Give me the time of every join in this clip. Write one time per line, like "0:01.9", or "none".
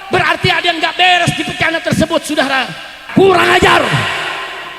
0:02.9